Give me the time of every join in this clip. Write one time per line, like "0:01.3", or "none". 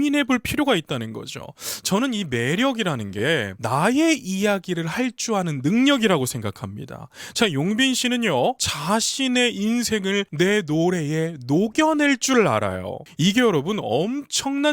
none